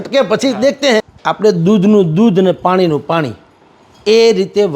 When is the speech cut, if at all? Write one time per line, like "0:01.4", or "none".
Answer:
0:01.2

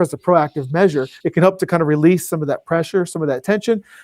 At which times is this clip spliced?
0:01.2

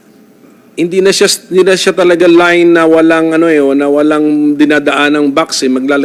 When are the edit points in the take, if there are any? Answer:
none

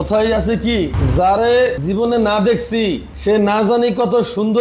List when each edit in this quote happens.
0:01.0
0:01.8
0:03.1

